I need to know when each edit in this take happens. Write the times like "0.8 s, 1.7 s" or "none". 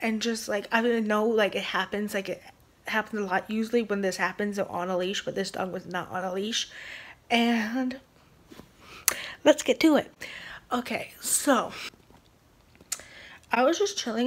none